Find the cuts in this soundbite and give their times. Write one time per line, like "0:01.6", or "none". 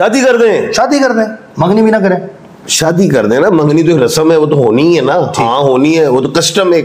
none